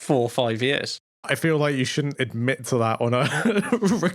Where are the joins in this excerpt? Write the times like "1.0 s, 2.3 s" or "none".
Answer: 1.0 s